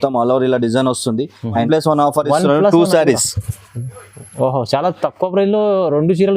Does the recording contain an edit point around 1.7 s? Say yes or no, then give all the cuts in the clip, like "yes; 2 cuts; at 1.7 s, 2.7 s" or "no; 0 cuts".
yes; 1 cut; at 1.7 s